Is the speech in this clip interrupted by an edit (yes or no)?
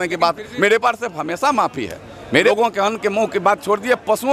yes